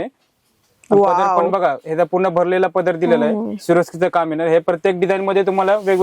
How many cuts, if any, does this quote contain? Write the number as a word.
zero